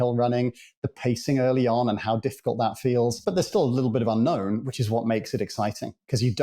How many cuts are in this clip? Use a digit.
1